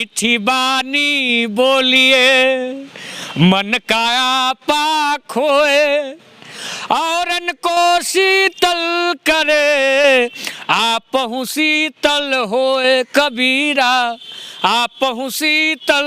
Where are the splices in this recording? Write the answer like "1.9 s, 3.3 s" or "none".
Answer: none